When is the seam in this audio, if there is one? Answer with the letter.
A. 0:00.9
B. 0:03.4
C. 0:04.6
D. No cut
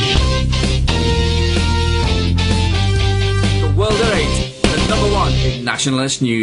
D